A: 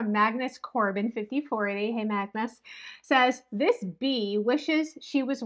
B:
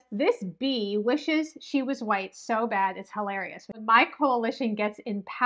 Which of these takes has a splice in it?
B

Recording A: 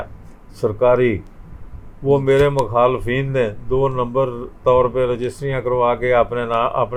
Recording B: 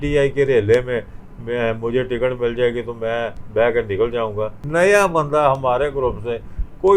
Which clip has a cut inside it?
B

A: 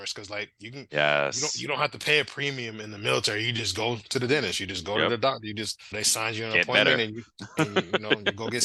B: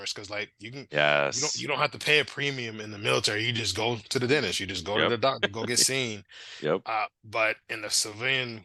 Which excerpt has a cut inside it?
B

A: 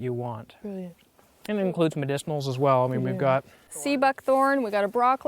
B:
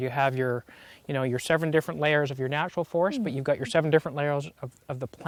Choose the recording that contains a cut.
A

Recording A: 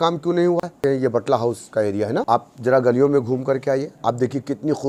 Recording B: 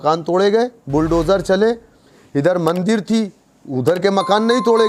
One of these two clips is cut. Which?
A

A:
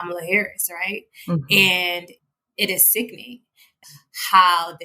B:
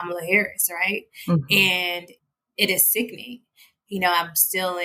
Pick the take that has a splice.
A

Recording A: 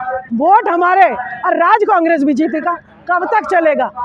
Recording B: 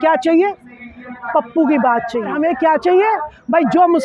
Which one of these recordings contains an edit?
B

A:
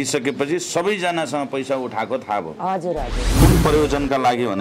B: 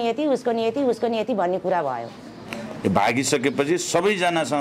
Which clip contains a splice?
A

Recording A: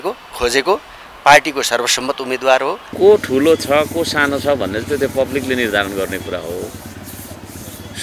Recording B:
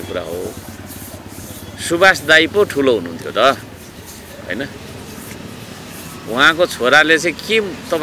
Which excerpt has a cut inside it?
A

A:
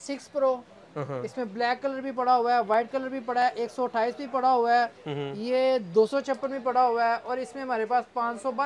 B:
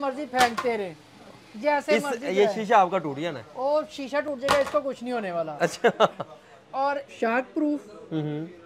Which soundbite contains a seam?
B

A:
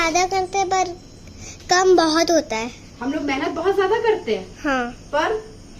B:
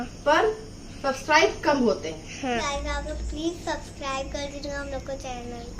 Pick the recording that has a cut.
B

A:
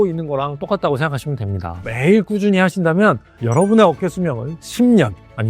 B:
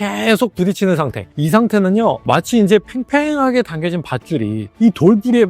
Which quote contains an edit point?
A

